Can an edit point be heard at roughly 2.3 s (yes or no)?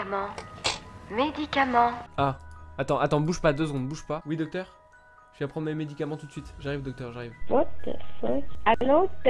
no